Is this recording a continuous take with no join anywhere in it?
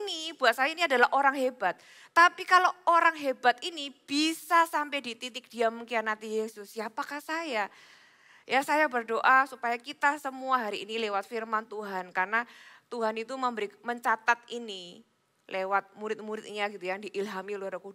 yes; 0 cuts

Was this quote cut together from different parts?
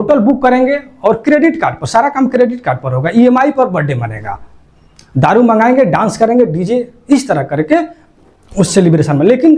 no; 0 cuts

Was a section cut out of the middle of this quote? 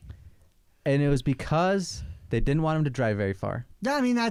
no; 0 cuts

